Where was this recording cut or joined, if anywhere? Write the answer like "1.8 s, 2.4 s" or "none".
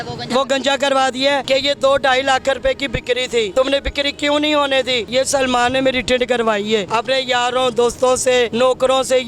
1.4 s, 3.5 s, 5.1 s, 6.9 s, 8.5 s